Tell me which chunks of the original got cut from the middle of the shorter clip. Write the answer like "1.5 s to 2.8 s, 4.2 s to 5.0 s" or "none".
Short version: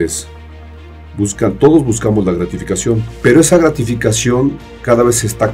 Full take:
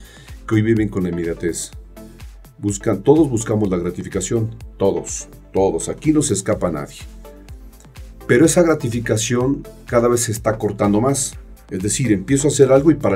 4.5 s to 8.1 s